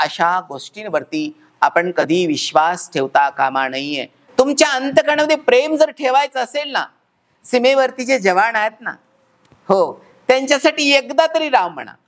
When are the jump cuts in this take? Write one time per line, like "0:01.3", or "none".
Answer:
0:04.2

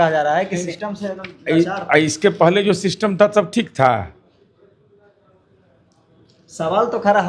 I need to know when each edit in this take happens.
none

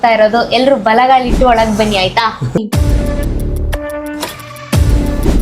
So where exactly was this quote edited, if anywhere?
0:02.6

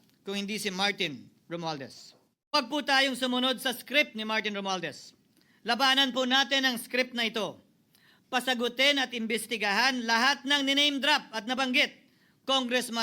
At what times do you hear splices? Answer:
0:02.5

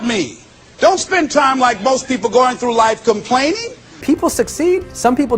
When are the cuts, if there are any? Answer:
0:03.9

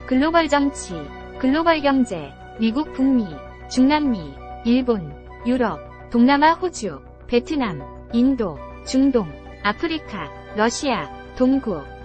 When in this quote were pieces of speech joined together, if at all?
none

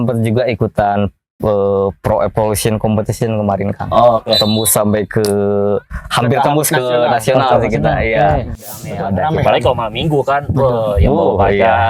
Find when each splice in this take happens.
0:09.0

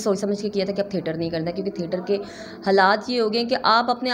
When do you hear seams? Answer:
none

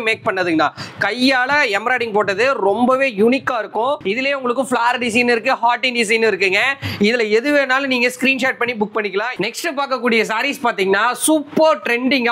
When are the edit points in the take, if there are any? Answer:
0:04.0
0:09.3

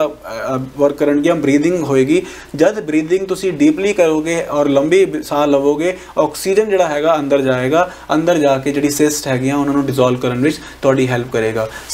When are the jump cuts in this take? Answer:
none

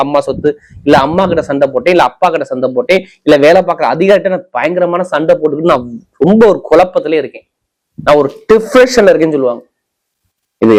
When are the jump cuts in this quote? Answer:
none

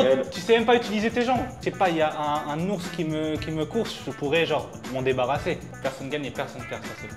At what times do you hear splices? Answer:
0:01.6
0:05.7

